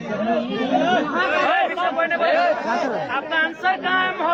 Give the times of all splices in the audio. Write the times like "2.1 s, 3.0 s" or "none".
none